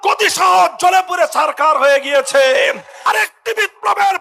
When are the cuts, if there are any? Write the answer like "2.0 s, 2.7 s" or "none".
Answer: 3.0 s